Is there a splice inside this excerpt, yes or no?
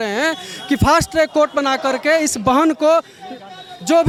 no